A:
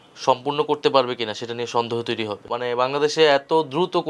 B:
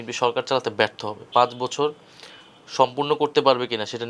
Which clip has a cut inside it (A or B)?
A